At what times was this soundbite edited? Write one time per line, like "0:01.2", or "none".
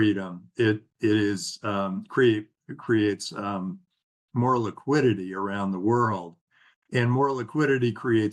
none